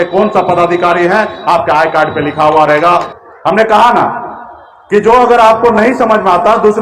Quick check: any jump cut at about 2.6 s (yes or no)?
no